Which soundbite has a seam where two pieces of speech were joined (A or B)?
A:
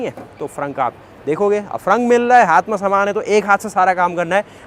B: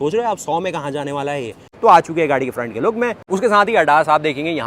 B